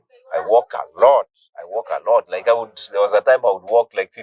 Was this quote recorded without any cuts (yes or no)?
yes